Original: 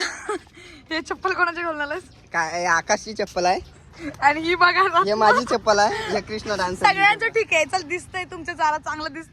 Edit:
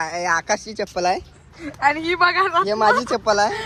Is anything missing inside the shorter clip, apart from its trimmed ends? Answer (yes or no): no